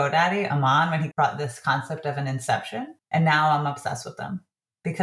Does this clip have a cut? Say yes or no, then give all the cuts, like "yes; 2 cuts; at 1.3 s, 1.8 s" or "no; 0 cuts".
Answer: yes; 2 cuts; at 1.1 s, 3.0 s